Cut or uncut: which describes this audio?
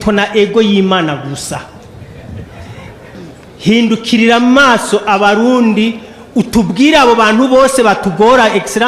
cut